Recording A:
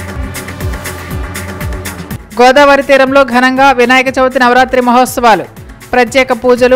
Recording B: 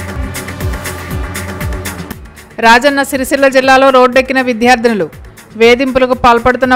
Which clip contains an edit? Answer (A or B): A